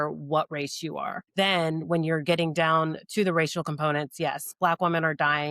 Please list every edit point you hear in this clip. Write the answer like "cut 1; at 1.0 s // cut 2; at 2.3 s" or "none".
cut 1; at 1.2 s